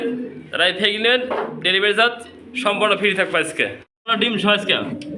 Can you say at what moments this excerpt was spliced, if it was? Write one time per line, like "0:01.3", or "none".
0:04.1

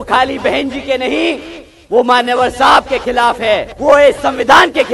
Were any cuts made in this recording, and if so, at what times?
0:03.7

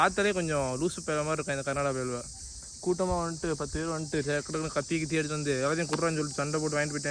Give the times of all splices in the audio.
none

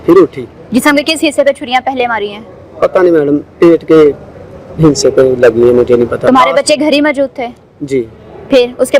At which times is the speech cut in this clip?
none

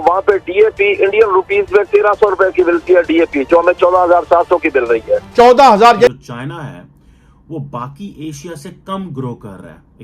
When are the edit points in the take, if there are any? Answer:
0:06.1

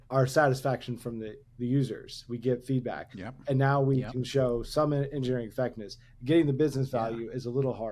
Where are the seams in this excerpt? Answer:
none

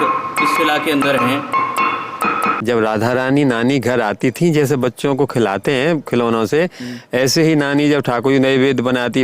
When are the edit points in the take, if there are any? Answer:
0:02.6

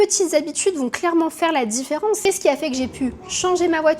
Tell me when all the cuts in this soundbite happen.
0:02.2

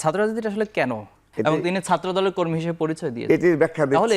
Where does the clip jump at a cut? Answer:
0:01.2

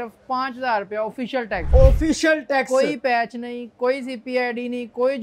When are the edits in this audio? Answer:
0:01.6

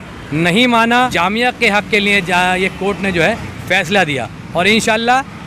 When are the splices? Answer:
0:01.1

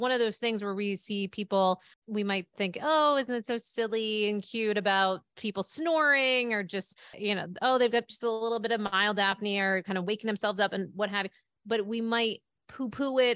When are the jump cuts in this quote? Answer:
0:01.9
0:07.2

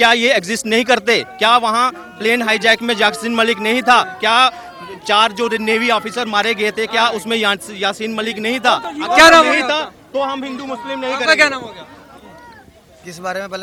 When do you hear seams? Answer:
none

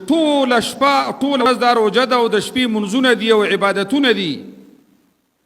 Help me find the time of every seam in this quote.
0:01.4

